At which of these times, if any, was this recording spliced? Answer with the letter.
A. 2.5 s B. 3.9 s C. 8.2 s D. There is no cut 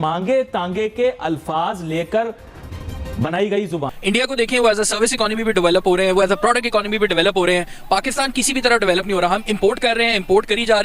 B